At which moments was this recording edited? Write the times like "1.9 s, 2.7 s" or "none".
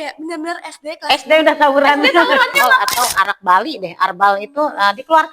2.7 s